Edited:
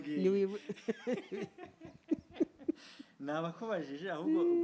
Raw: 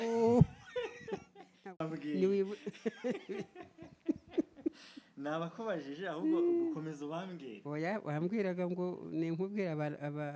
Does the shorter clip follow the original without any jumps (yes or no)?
yes